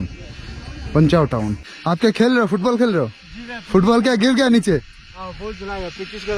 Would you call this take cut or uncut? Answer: cut